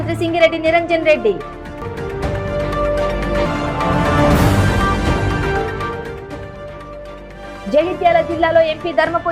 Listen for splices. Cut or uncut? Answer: uncut